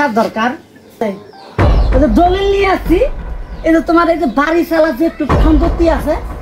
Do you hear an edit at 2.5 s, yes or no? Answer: no